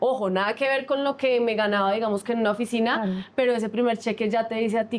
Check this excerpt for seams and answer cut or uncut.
uncut